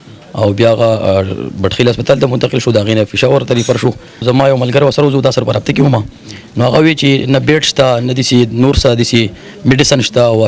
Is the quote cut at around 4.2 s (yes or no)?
yes